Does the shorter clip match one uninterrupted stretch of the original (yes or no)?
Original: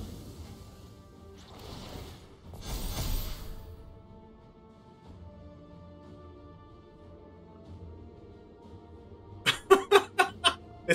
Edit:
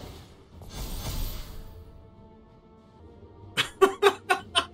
no